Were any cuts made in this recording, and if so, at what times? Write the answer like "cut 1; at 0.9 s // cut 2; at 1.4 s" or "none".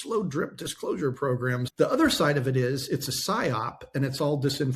cut 1; at 1.6 s